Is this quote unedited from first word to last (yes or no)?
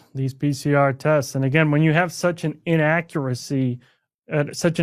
yes